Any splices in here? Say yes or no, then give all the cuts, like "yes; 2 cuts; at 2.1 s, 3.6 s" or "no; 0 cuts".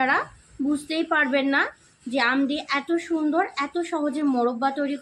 no; 0 cuts